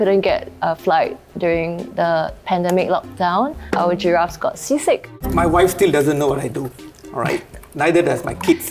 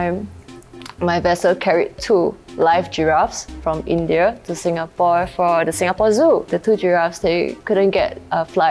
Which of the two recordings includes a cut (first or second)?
first